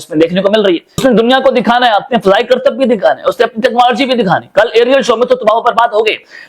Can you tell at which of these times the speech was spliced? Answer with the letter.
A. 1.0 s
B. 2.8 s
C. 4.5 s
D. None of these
A